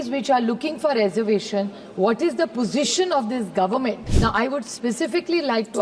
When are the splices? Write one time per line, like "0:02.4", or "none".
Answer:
0:04.1